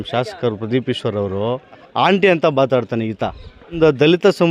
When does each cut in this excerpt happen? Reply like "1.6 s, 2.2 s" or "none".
1.9 s, 3.8 s